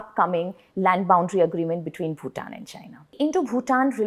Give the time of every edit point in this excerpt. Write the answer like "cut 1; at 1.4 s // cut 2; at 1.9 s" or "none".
cut 1; at 3.1 s